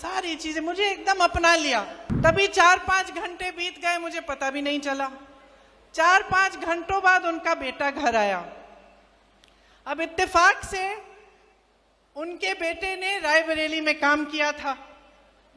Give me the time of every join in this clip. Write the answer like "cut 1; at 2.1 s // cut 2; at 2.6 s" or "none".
cut 1; at 2.0 s